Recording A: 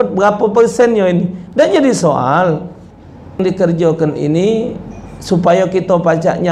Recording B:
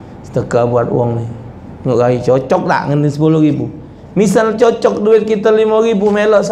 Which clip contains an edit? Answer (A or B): A